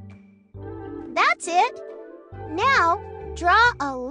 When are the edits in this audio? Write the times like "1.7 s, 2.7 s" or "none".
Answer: 1.1 s